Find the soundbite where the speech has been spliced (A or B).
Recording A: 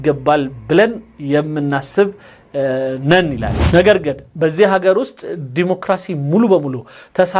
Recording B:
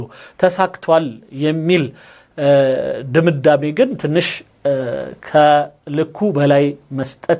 A